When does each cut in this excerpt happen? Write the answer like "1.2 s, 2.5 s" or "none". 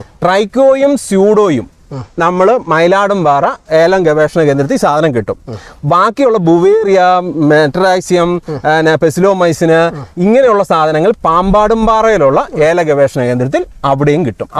none